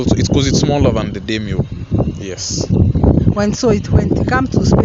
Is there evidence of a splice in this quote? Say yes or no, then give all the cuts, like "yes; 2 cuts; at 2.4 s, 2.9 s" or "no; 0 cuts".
no; 0 cuts